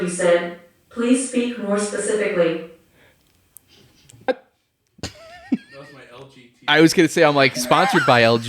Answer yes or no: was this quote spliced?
yes